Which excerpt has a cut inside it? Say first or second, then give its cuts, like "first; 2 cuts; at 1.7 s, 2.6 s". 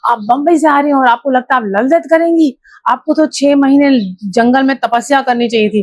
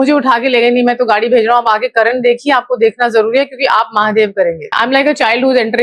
second; 1 cut; at 4.7 s